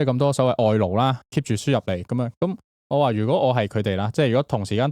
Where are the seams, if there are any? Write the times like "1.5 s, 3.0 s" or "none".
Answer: 1.2 s, 2.7 s